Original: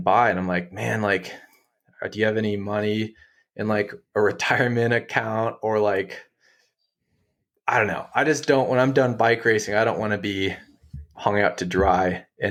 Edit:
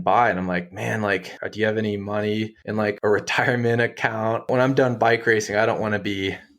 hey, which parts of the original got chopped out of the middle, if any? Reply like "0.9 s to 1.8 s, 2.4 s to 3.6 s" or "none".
1.4 s to 2.0 s, 3.5 s to 4.0 s, 5.6 s to 8.7 s